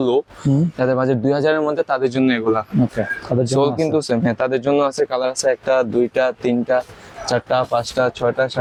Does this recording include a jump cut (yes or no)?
no